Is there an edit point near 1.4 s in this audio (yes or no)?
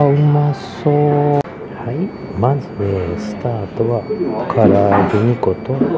yes